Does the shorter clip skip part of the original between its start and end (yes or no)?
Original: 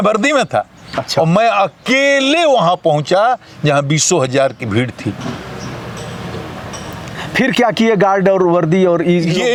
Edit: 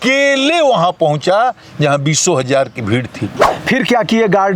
yes